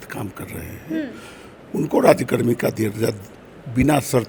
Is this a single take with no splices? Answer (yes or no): yes